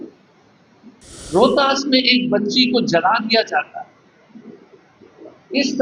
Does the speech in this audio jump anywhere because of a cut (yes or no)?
yes